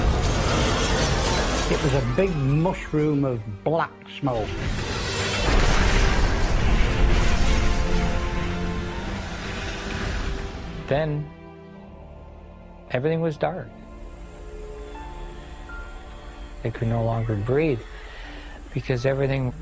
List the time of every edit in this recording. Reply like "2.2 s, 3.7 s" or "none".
11.4 s

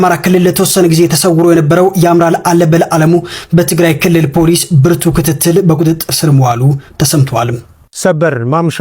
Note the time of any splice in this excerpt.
7.9 s

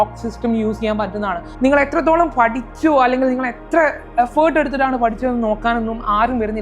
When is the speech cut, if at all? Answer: 1.4 s

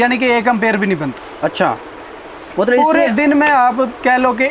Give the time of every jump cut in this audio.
none

